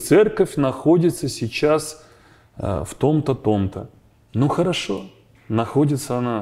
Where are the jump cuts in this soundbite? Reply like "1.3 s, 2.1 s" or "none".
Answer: none